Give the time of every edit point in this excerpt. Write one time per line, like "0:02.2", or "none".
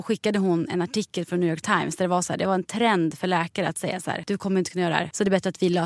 0:04.2
0:05.1